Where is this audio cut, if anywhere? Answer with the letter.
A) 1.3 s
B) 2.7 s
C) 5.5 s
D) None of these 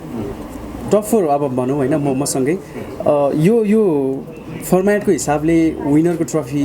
D